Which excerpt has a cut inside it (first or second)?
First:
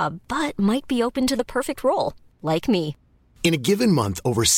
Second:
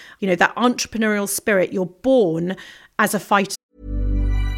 second